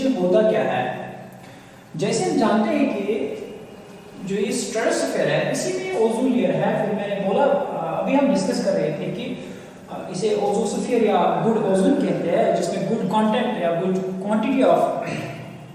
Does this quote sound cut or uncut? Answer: uncut